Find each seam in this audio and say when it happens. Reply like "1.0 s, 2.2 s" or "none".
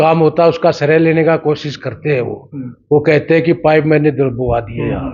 none

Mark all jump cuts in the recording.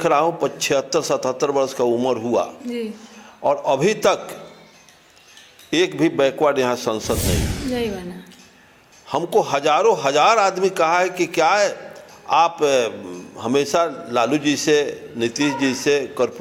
none

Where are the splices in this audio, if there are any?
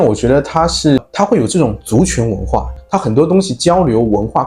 1.0 s, 2.7 s

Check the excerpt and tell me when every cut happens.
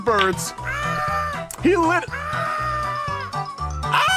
none

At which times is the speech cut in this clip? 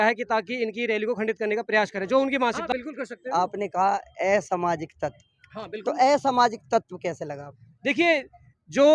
2.6 s

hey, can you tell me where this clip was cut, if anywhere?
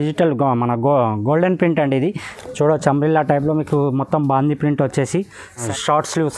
2.3 s, 5.6 s

